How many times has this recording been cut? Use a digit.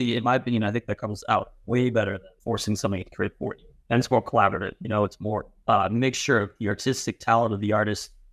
3